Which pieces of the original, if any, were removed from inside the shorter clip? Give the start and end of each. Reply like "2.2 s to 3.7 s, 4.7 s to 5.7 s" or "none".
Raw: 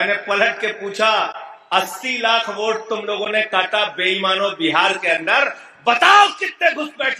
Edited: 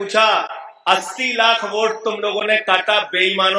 none